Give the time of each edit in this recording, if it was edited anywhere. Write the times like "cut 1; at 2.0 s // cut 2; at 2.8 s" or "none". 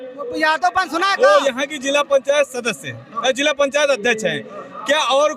cut 1; at 1.1 s